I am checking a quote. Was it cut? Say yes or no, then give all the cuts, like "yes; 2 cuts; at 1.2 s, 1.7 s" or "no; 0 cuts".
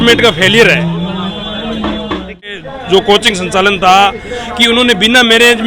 yes; 1 cut; at 2.5 s